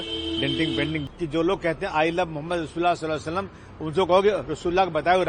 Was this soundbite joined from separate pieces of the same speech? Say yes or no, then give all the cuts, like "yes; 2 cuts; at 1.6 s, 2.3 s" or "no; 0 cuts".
yes; 1 cut; at 1.1 s